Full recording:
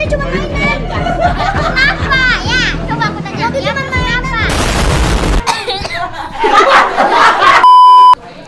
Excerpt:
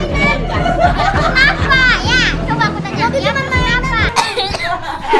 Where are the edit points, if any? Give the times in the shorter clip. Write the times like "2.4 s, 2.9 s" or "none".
4.1 s